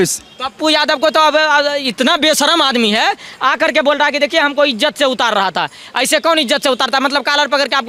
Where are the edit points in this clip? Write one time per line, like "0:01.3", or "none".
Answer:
none